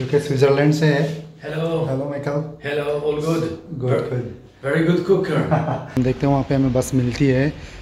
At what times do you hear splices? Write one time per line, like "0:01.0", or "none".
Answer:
0:05.9